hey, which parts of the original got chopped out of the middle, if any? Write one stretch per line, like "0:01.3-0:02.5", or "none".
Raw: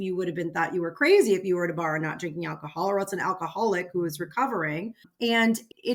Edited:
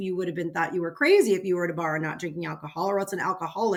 none